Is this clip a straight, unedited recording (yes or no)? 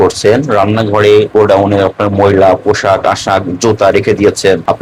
yes